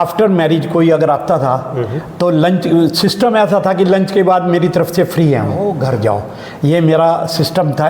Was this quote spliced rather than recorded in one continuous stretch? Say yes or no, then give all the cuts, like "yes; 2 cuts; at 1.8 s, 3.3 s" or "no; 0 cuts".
yes; 1 cut; at 5.7 s